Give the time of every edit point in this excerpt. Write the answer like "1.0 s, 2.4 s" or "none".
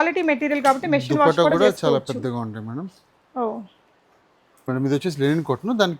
4.7 s